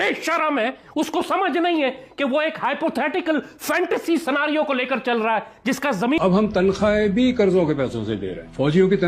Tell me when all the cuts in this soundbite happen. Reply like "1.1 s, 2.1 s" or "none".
6.2 s